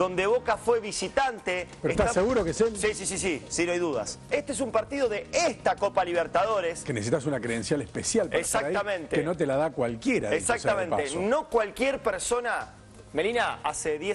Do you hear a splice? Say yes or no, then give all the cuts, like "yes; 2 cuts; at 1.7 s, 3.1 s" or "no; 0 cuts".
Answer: no; 0 cuts